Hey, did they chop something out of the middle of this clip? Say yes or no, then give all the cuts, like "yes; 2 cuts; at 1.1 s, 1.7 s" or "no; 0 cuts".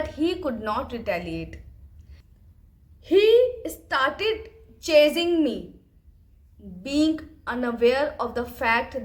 yes; 1 cut; at 2.2 s